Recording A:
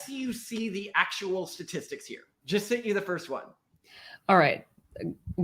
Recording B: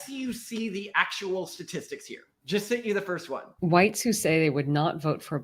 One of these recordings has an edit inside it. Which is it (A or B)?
B